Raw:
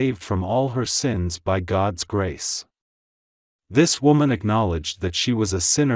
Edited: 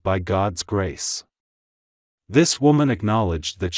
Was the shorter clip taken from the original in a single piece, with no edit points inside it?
yes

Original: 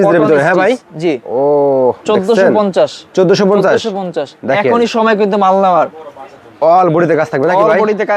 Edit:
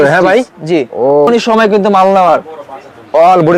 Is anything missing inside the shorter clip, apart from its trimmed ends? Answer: yes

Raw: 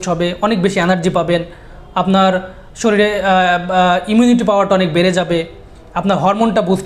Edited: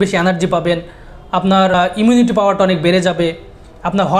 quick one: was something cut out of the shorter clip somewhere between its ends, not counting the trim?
yes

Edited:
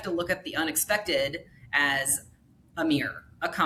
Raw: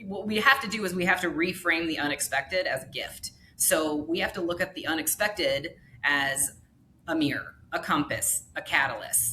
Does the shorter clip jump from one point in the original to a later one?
no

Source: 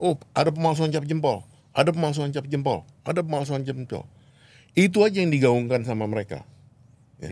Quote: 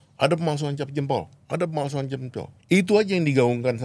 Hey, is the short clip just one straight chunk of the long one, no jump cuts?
no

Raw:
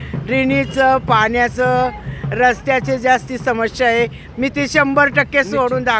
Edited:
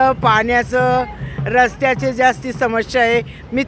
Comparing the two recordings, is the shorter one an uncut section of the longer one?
yes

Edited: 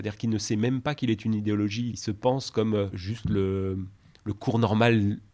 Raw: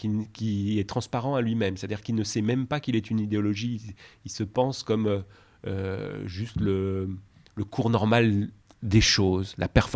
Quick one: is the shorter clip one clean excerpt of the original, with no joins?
no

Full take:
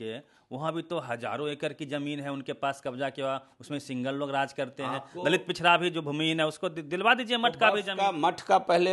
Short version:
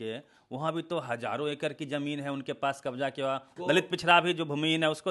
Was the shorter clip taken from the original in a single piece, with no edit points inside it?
no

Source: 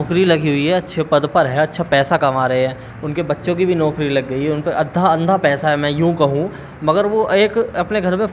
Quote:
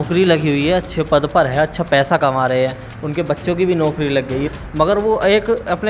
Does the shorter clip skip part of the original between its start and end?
yes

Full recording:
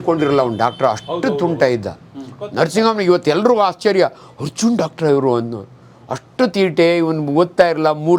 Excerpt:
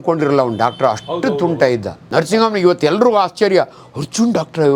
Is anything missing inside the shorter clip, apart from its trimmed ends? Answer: yes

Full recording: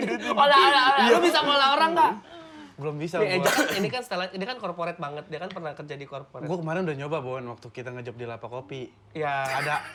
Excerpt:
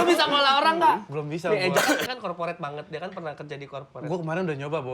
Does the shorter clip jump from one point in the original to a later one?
yes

